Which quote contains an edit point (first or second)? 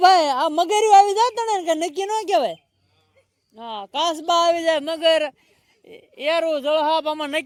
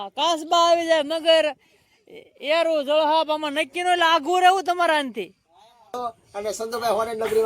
second